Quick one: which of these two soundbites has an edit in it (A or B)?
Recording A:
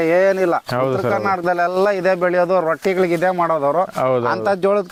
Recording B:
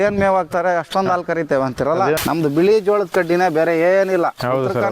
B